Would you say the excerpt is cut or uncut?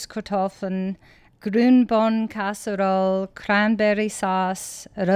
cut